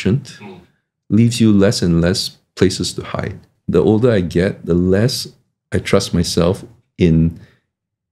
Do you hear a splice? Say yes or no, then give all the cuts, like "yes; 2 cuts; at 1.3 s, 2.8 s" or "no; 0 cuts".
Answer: yes; 1 cut; at 3.4 s